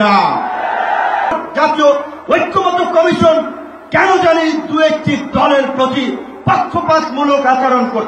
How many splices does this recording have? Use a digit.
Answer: 1